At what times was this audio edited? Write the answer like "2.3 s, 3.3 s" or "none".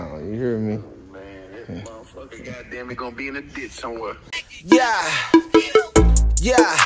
4.4 s